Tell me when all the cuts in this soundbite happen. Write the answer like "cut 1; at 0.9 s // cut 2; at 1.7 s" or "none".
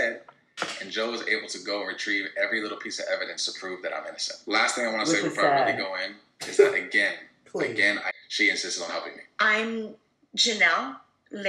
cut 1; at 8.2 s